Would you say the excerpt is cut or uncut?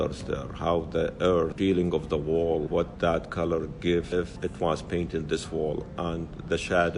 cut